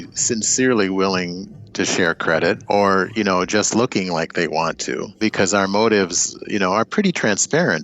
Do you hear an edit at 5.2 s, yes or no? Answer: yes